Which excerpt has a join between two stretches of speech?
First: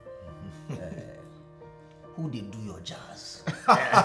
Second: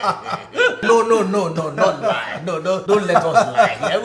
second; 2 cuts; at 0.8 s, 2.8 s

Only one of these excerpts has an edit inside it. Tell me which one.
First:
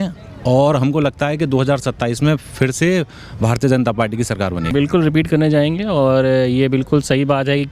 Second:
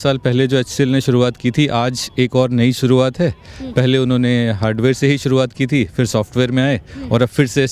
first; 1 cut; at 4.6 s

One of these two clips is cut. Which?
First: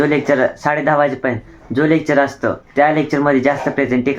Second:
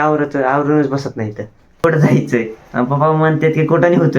second; 1 cut; at 1.8 s

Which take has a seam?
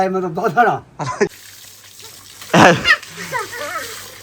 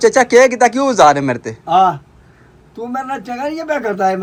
first; 1 cut; at 1.3 s

